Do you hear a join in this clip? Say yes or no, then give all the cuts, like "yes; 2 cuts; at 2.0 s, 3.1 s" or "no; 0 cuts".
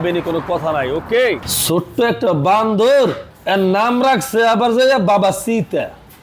no; 0 cuts